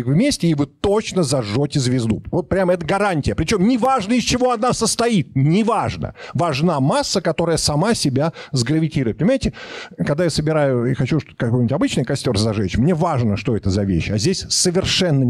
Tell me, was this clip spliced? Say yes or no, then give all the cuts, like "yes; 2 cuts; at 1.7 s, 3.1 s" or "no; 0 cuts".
no; 0 cuts